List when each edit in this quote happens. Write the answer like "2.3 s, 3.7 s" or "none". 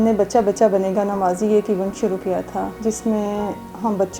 2.7 s